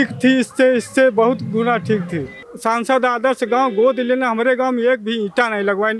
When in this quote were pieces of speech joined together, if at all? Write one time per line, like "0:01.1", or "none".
0:02.4